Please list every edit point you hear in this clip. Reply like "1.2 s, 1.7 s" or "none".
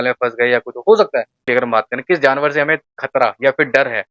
1.4 s